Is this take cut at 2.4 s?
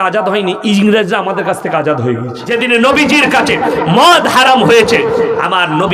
yes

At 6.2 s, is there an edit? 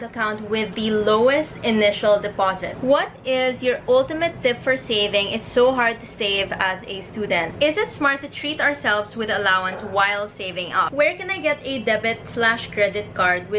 no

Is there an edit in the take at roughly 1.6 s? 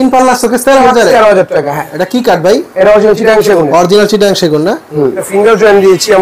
no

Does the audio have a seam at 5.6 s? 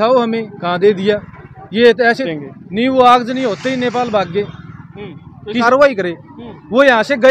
yes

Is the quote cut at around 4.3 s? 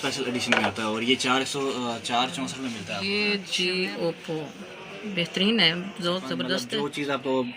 no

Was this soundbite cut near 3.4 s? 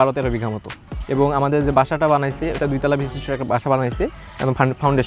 no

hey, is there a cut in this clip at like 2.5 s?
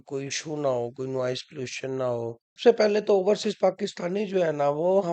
yes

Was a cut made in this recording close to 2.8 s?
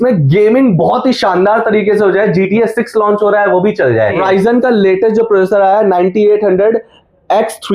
no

